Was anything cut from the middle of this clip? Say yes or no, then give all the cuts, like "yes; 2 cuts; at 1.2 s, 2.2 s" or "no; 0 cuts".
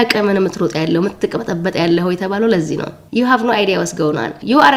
no; 0 cuts